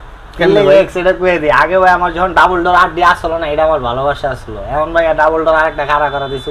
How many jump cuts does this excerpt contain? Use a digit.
0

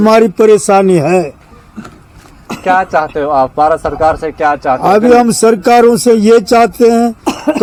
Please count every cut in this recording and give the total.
0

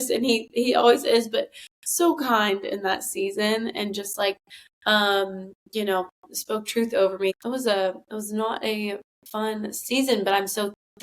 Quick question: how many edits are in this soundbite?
1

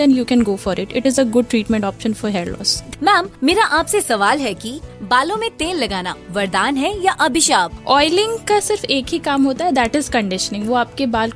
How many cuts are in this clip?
2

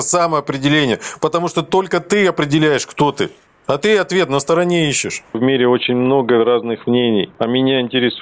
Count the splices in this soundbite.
2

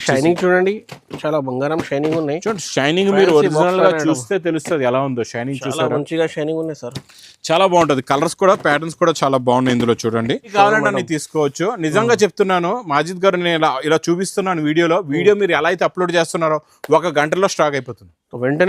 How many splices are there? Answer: 1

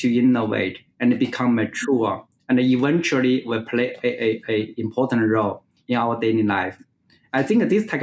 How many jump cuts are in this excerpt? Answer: 0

